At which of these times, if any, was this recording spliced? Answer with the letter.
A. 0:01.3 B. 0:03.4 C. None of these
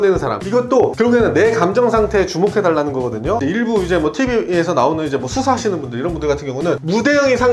B